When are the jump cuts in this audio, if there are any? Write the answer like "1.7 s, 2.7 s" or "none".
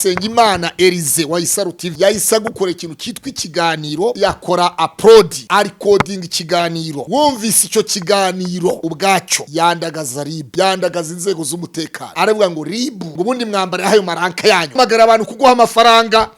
1.8 s, 4.2 s, 5.4 s, 7.0 s, 8.9 s, 10.4 s, 12.0 s, 13.0 s, 14.8 s